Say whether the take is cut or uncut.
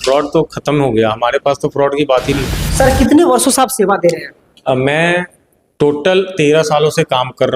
cut